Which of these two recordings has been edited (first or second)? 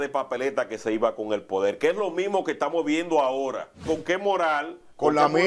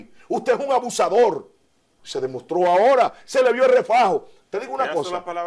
first